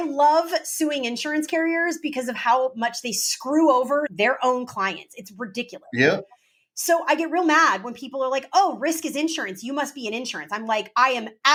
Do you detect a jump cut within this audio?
no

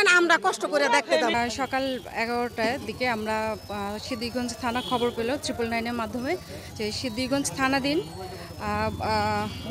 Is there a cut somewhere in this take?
no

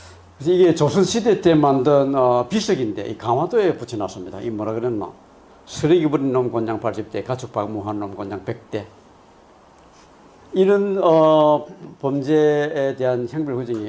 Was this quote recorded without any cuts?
yes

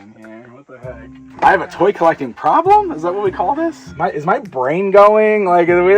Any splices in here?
yes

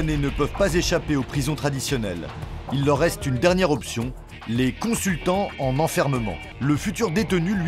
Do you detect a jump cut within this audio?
yes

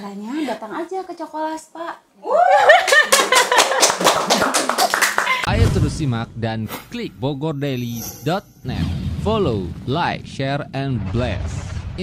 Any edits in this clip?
yes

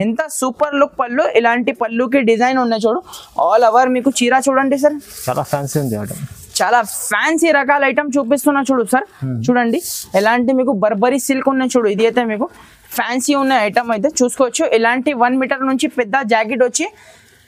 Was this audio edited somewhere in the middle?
no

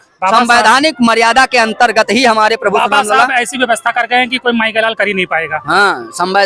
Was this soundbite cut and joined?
no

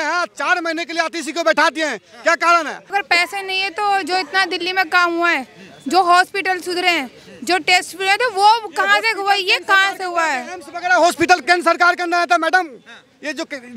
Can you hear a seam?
yes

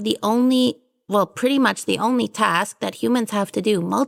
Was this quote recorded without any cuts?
yes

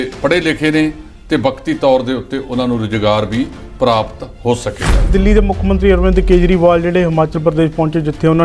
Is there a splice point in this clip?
yes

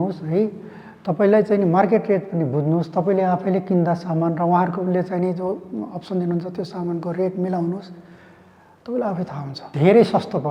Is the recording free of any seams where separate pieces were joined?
no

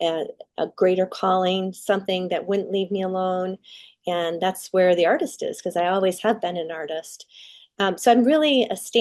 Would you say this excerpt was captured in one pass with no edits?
yes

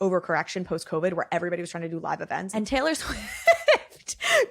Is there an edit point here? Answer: yes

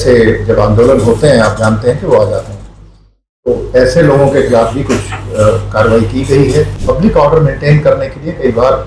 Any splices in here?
yes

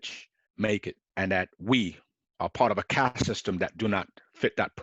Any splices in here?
yes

